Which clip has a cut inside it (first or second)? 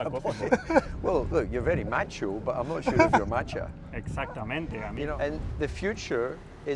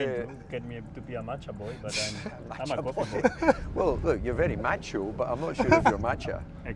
first